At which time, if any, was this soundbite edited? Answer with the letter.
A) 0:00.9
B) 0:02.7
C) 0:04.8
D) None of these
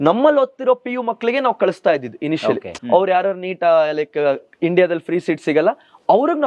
B